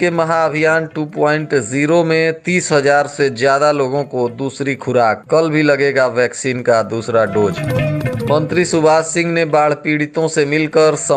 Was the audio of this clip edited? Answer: no; 0 cuts

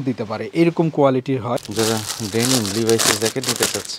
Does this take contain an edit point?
yes; 1 cut; at 1.6 s

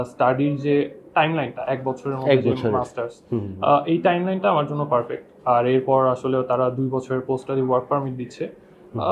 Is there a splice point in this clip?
no; 0 cuts

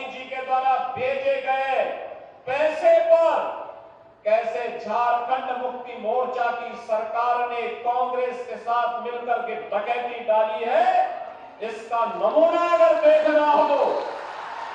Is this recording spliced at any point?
no; 0 cuts

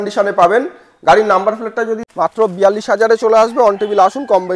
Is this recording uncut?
no; 1 cut; at 2.0 s

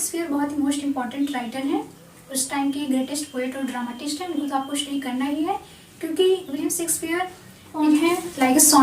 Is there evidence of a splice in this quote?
yes; 1 cut; at 7.8 s

